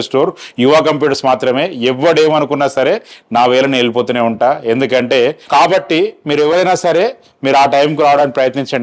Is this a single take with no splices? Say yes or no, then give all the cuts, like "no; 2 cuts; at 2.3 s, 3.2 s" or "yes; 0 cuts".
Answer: no; 1 cut; at 5.4 s